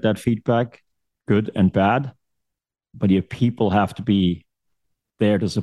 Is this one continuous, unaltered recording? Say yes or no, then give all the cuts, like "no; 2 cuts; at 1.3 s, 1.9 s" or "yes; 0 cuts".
yes; 0 cuts